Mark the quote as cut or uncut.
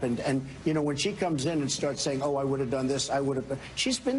uncut